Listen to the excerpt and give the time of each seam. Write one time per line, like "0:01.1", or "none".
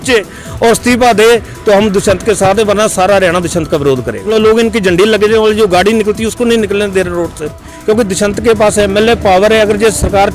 0:04.3
0:07.7